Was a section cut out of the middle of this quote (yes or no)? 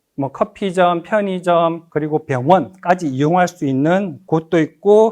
yes